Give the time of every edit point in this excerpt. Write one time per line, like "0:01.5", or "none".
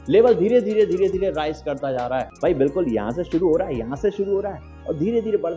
0:02.3